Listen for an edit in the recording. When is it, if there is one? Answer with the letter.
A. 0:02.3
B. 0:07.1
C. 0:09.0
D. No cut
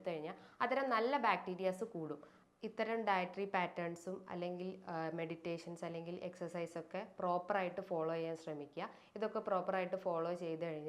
A